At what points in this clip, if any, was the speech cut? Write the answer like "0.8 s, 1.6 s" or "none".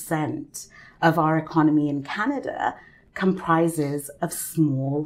none

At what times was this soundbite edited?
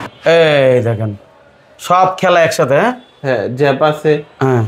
none

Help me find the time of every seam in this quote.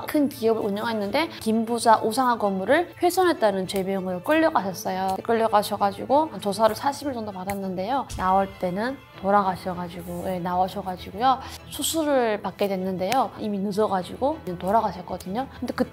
1.4 s, 8.1 s

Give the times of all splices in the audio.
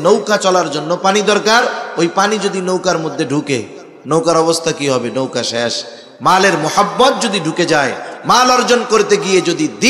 none

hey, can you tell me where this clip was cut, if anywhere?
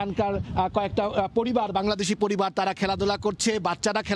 none

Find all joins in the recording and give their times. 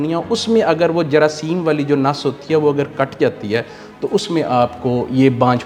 none

